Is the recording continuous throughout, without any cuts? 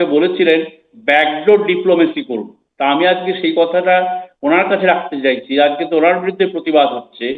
yes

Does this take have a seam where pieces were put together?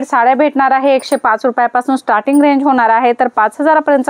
no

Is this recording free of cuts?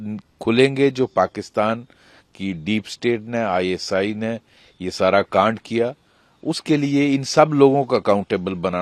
yes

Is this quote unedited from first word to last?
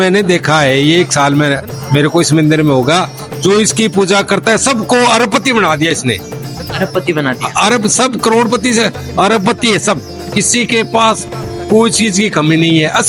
yes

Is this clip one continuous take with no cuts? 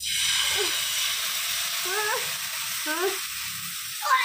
yes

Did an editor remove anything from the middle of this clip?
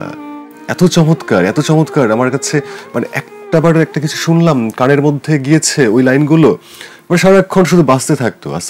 no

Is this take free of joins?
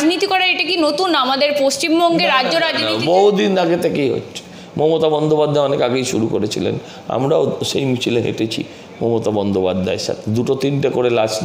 yes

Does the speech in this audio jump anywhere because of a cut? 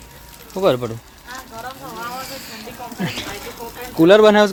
no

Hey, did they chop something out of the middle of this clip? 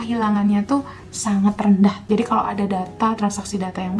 yes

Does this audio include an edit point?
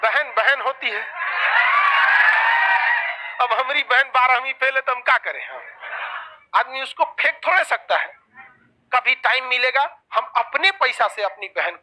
no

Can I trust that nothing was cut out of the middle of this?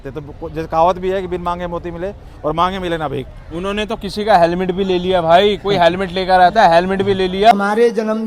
yes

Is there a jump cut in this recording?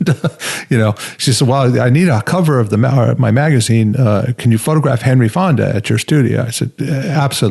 no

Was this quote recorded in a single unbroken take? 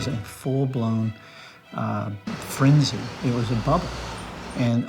yes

